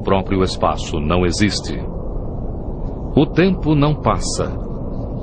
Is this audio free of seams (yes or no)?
yes